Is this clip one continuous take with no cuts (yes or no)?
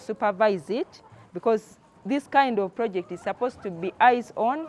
yes